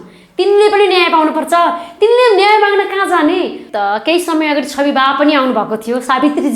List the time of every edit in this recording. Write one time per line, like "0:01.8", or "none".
0:03.7

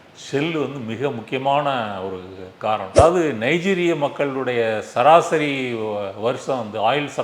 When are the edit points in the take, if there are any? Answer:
0:03.0

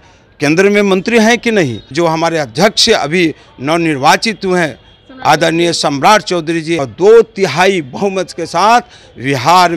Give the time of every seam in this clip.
0:01.8
0:06.9

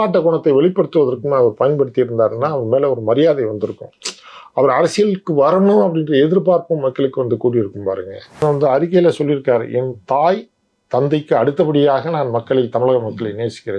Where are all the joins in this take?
0:08.4

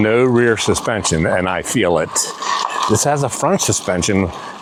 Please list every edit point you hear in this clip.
none

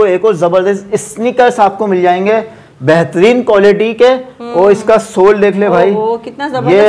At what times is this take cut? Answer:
none

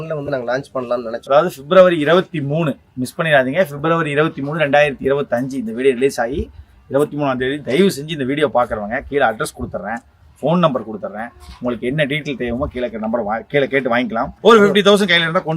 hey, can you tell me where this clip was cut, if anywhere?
0:01.1
0:14.3

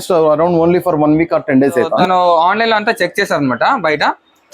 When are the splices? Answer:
0:02.0

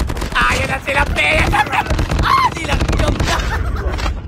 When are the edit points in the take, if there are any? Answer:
none

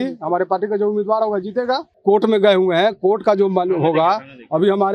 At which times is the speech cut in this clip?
0:01.9

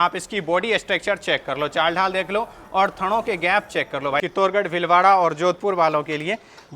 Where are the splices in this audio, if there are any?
0:04.2

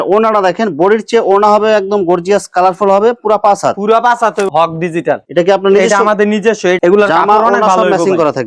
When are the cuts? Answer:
0:04.5
0:06.8

